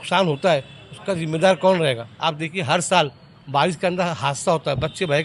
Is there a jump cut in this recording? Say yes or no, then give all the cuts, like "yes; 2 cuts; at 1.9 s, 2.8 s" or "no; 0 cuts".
yes; 1 cut; at 2.1 s